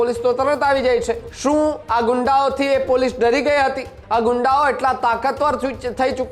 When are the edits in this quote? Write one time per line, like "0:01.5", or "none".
0:01.3
0:04.0